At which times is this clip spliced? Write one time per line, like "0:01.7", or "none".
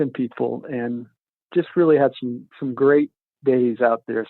0:01.4